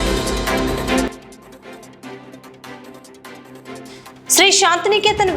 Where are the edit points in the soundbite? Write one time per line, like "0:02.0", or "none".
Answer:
0:01.0